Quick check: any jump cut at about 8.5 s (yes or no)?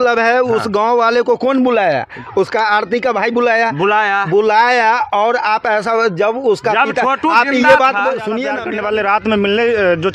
yes